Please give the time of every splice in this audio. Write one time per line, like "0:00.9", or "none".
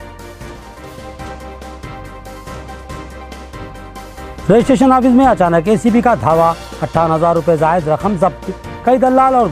none